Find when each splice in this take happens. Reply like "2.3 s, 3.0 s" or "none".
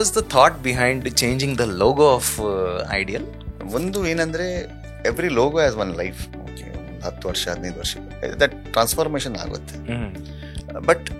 3.3 s